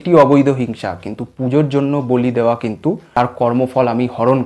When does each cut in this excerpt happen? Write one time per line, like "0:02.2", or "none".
0:03.1